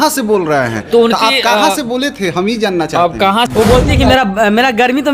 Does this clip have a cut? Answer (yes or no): yes